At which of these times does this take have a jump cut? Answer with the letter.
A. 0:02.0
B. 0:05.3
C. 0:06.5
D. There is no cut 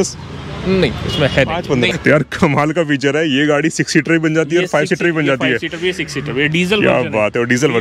A